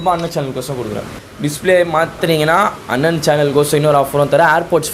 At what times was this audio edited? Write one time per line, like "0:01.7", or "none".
0:01.1
0:02.2